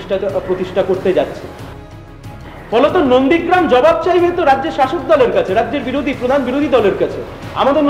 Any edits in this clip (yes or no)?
yes